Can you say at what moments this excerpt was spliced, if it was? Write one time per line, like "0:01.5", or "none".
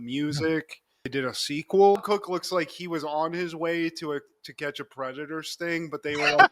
0:02.0